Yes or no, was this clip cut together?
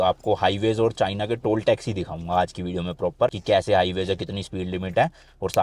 no